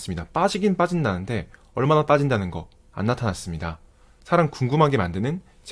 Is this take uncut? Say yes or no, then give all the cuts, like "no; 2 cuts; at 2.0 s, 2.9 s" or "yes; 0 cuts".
yes; 0 cuts